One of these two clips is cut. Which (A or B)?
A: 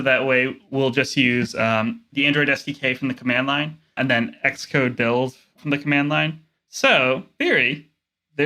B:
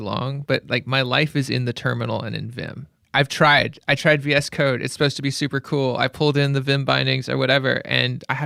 A